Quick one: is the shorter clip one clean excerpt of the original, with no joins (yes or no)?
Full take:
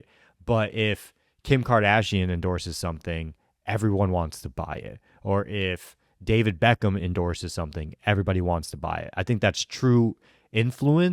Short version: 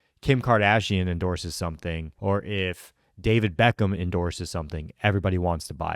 no